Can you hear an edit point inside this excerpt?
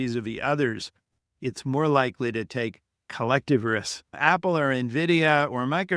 yes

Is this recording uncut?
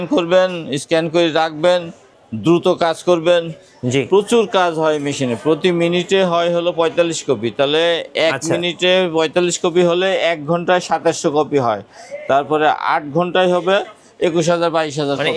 yes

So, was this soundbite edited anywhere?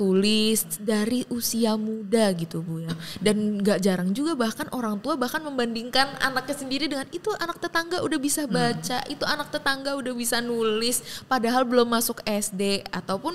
no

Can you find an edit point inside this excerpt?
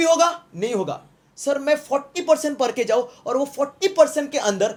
no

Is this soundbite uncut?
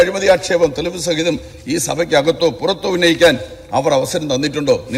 yes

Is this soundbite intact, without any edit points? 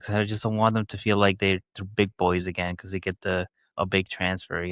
yes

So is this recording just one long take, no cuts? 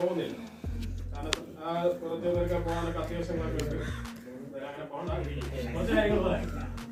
yes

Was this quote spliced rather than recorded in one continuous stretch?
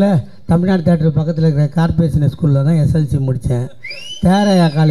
no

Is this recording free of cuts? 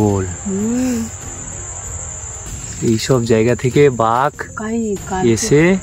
yes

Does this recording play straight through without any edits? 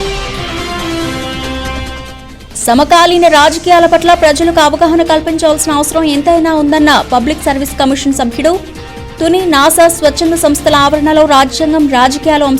no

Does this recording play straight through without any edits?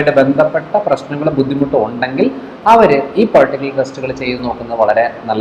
yes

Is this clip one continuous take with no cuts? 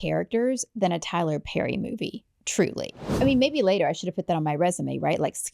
no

